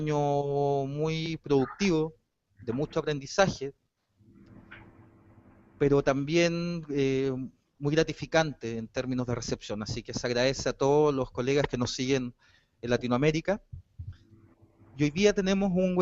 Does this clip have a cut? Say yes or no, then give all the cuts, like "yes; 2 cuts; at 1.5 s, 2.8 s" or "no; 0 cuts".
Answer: no; 0 cuts